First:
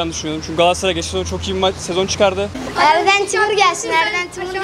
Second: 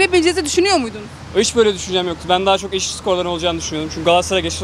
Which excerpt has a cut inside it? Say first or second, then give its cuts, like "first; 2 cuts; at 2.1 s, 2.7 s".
first; 1 cut; at 2.6 s